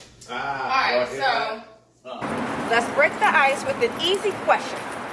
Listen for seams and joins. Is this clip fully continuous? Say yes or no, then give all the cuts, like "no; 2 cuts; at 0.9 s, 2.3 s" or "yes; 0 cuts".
no; 1 cut; at 2.2 s